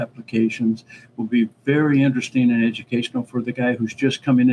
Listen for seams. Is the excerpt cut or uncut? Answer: uncut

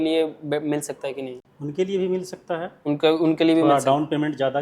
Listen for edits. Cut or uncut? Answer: uncut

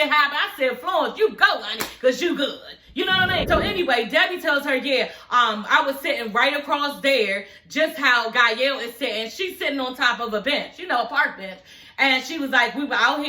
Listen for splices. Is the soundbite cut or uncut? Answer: cut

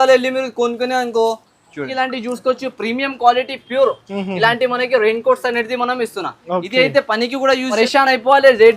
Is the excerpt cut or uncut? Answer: cut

